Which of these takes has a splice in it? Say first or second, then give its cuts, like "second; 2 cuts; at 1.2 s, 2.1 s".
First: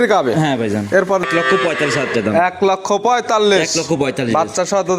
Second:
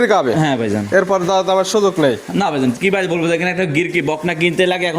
first; 1 cut; at 1.2 s